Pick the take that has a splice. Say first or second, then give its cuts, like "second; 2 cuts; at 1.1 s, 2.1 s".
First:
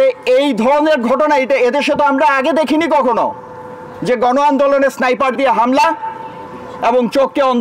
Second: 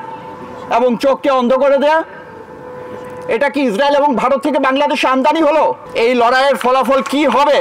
second; 1 cut; at 5.8 s